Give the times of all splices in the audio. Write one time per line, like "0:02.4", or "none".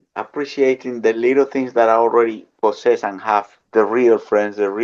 0:03.6